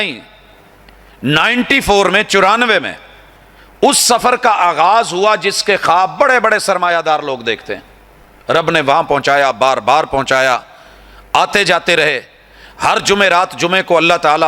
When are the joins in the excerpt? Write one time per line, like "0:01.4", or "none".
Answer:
none

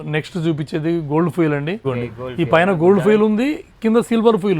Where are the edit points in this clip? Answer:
0:01.8

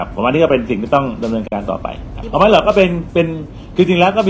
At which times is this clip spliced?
0:02.1

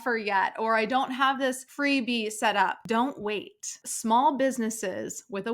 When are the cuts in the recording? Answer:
0:01.7
0:02.8
0:03.8

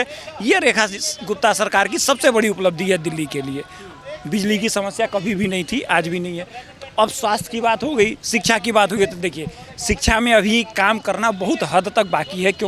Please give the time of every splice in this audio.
none

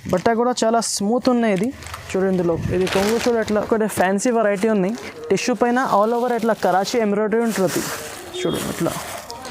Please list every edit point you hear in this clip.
0:03.6

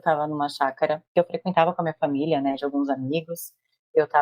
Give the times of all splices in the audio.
0:01.1

